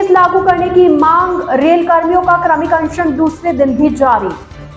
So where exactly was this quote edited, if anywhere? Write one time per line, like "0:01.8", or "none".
none